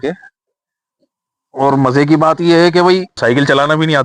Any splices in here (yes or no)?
yes